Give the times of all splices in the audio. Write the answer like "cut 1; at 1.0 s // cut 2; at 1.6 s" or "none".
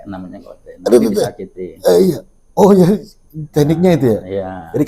none